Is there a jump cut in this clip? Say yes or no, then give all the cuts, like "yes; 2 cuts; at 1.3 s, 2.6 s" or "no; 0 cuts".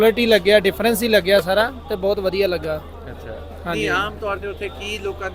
no; 0 cuts